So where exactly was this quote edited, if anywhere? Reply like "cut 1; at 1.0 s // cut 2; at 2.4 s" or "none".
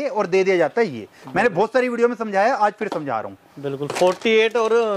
none